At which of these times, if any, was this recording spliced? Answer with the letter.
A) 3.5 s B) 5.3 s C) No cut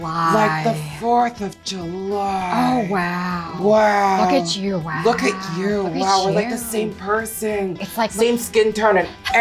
A